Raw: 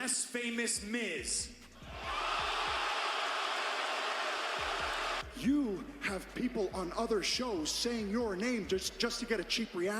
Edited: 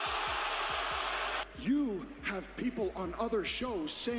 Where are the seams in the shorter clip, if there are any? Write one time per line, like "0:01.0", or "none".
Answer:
0:01.4